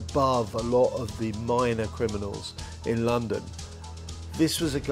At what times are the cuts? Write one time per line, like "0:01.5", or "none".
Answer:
0:03.9